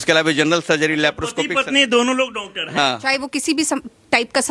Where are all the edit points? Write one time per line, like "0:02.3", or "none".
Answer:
0:03.0